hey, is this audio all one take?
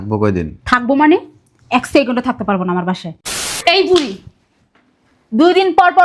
no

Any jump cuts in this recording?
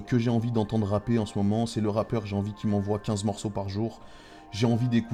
no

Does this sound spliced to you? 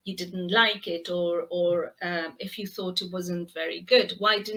no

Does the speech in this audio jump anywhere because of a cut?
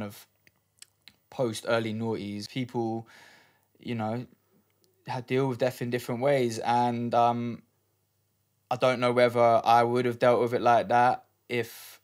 yes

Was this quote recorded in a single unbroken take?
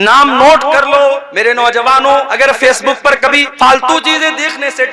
no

